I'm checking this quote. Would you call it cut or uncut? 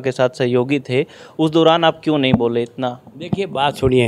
uncut